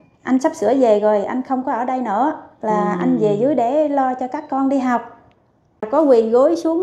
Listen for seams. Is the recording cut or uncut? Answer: cut